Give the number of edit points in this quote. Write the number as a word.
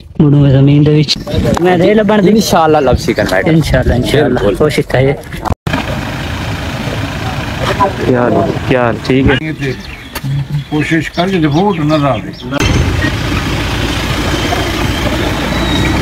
two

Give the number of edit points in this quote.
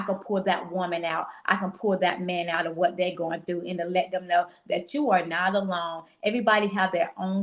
zero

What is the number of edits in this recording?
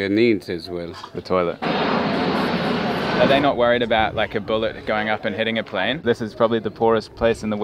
three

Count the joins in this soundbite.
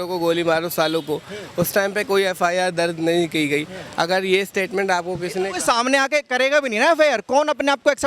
zero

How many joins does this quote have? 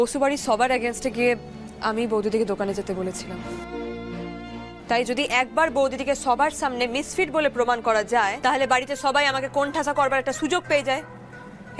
two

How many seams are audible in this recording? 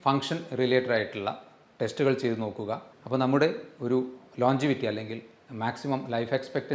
one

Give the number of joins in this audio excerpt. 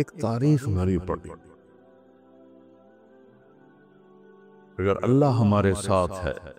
three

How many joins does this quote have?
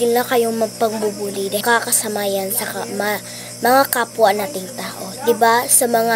one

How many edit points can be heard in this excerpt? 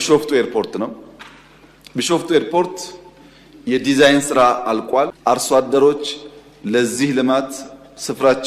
one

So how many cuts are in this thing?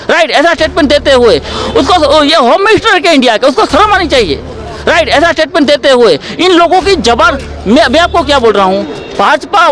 one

